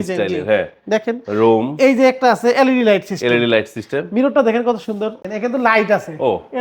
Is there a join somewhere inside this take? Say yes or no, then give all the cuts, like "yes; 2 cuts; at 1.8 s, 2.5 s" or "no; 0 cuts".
yes; 1 cut; at 5.2 s